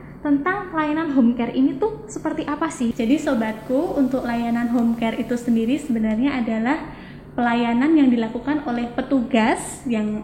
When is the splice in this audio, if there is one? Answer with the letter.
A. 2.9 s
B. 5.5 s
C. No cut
A